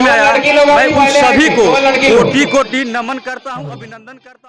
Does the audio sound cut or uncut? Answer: uncut